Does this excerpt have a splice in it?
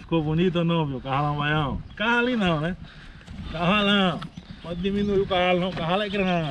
no; 0 cuts

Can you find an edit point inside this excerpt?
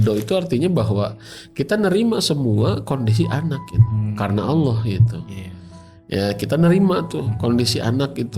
no; 0 cuts

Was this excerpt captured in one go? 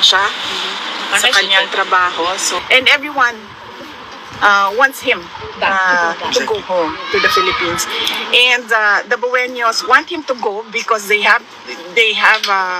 no; 1 cut; at 2.6 s

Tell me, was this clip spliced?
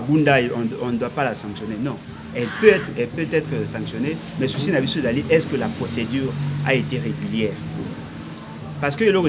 no; 0 cuts

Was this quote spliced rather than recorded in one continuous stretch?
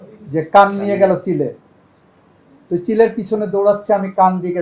no; 0 cuts

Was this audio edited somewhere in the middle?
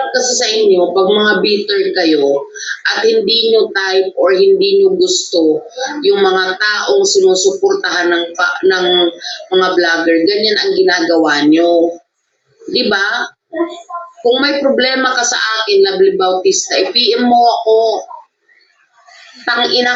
no; 0 cuts

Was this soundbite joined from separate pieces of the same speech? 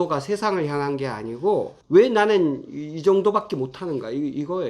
yes; 1 cut; at 1.8 s

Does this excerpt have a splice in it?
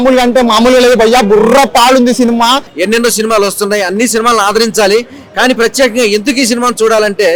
yes; 1 cut; at 2.7 s

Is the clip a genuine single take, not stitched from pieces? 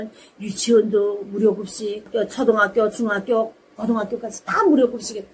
yes; 0 cuts

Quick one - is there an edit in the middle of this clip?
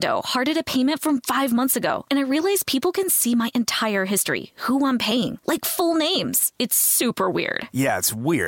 no; 0 cuts

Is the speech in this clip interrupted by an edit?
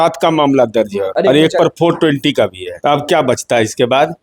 yes; 2 cuts; at 1.0 s, 2.7 s

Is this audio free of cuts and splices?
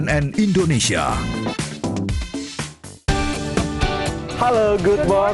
yes; 0 cuts

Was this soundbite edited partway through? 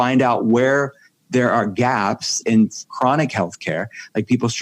yes; 1 cut; at 2.4 s

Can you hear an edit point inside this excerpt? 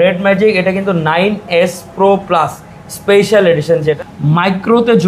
yes; 1 cut; at 4.0 s

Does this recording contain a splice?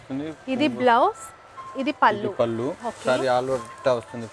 no; 0 cuts

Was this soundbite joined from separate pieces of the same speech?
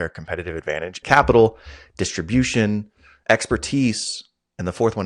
yes; 1 cut; at 0.9 s

